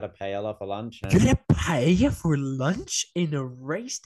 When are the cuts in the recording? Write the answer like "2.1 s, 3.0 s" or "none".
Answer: 1.1 s